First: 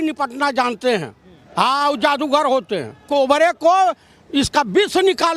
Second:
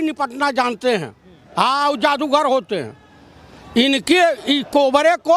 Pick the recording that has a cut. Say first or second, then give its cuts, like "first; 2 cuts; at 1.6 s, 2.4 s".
first; 1 cut; at 3.0 s